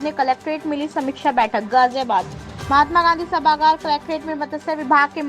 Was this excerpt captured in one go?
yes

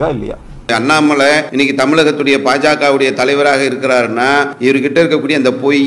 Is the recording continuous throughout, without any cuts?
no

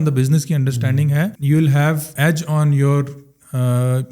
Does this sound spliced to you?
yes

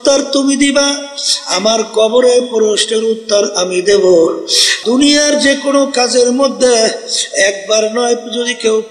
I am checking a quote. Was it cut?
yes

